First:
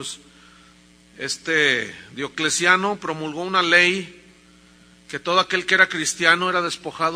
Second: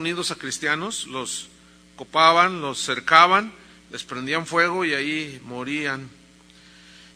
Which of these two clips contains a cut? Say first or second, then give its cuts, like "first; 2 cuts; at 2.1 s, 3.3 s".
first; 1 cut; at 5.2 s